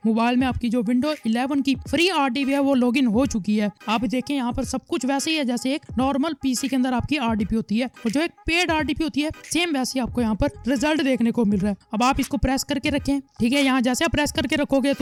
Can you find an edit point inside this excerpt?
no; 0 cuts

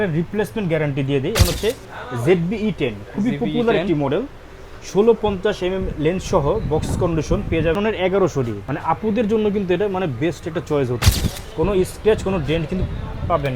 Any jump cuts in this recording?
yes; 4 cuts; at 1.4 s, 7.8 s, 8.6 s, 11.0 s

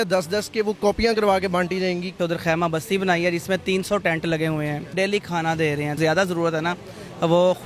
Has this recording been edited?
yes; 3 cuts; at 2.1 s, 4.9 s, 6.0 s

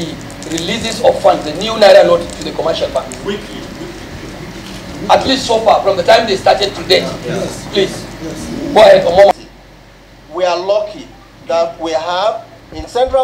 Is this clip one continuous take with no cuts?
no; 1 cut; at 9.5 s

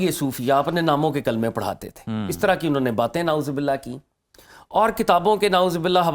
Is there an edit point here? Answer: no; 0 cuts

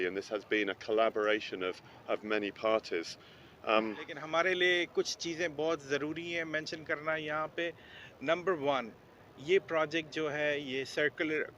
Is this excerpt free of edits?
no; 1 cut; at 4.2 s

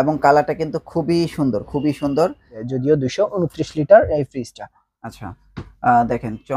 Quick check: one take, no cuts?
no; 1 cut; at 2.6 s

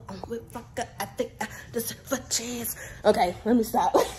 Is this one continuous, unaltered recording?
yes; 0 cuts

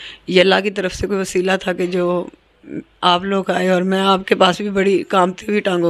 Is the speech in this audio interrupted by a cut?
no; 0 cuts

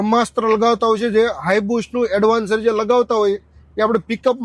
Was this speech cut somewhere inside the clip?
no; 0 cuts

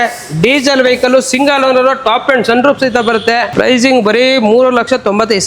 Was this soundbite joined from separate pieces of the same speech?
yes; 1 cut; at 3.5 s

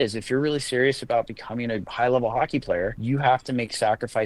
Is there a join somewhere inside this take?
yes; 2 cuts; at 1.9 s, 3.0 s

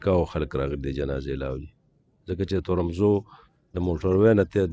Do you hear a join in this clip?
no; 0 cuts

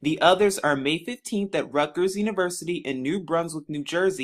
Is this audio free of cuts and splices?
yes; 0 cuts

